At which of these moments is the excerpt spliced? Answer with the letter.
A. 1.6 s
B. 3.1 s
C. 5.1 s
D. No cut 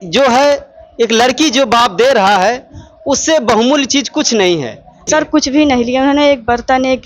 C